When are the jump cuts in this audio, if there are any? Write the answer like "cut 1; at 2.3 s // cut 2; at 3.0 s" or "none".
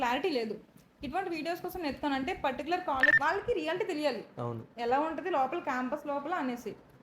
cut 1; at 3.1 s